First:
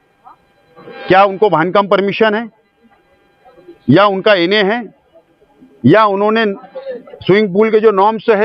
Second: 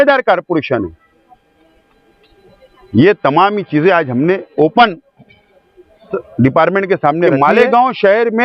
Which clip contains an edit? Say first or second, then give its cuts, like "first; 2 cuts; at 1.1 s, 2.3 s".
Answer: second; 1 cut; at 7.3 s